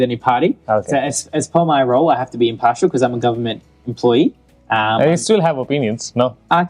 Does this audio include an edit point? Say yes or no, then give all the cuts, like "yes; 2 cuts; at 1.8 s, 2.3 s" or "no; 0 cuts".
no; 0 cuts